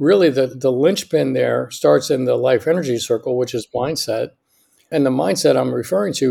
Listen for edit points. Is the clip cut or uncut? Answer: cut